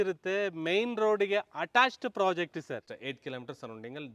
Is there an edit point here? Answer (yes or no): yes